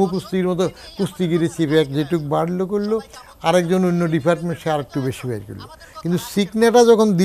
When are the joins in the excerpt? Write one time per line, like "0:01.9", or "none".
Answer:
none

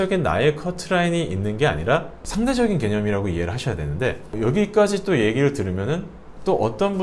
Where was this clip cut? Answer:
none

